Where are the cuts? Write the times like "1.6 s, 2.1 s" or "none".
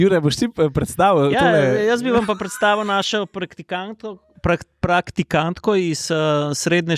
none